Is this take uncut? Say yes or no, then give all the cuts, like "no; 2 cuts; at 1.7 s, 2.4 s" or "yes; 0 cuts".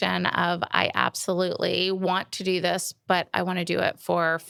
yes; 0 cuts